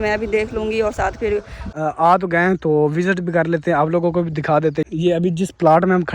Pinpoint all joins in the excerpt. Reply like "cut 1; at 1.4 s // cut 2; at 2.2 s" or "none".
cut 1; at 1.6 s // cut 2; at 4.8 s

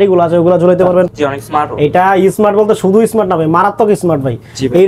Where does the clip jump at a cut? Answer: cut 1; at 1.2 s

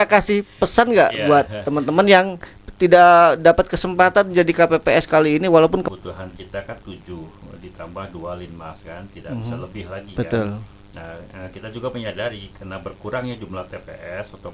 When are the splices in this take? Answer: cut 1; at 5.9 s

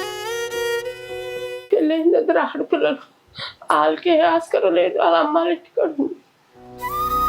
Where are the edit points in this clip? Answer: cut 1; at 1.5 s

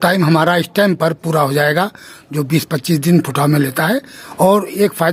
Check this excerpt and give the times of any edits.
cut 1; at 4.2 s

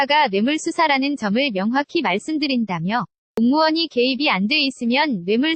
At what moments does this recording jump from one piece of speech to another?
cut 1; at 3.2 s

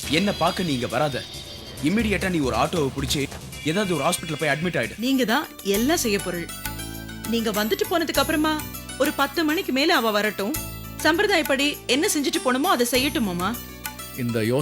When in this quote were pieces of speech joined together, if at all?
cut 1; at 4.9 s

